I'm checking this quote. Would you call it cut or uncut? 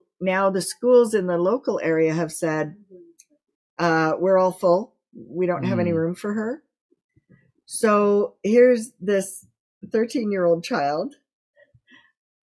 uncut